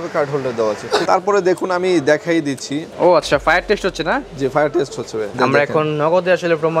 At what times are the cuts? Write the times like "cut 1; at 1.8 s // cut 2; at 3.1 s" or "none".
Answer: cut 1; at 1.0 s // cut 2; at 5.3 s